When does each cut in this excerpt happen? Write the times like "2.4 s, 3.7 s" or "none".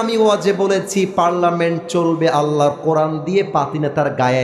none